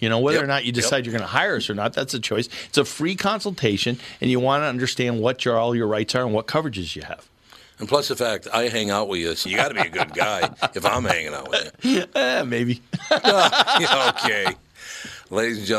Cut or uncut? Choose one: uncut